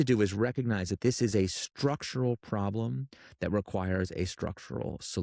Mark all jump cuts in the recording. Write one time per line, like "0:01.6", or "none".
none